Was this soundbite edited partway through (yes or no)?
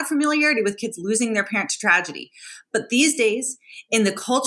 no